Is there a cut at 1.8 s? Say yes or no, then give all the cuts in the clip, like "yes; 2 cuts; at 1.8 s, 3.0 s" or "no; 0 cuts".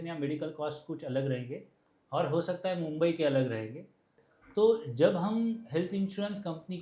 no; 1 cut; at 4.2 s